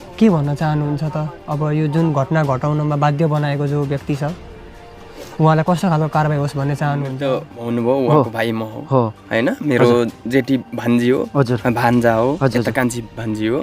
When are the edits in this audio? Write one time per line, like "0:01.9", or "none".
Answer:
0:07.2